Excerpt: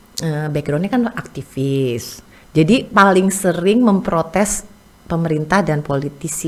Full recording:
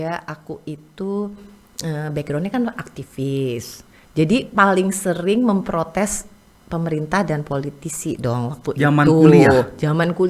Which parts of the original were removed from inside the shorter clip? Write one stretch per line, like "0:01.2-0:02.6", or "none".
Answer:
none